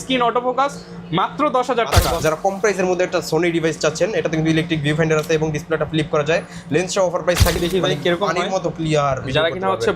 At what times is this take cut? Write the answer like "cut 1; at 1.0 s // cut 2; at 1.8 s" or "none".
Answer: cut 1; at 2.2 s // cut 2; at 7.6 s